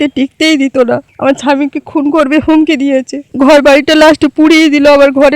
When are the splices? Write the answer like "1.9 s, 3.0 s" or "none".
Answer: 3.2 s